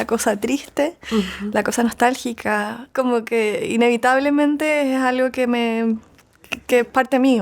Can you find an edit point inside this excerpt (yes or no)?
yes